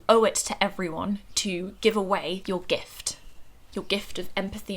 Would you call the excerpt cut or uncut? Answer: cut